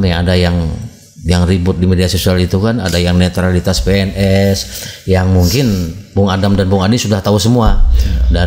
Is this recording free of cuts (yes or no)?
yes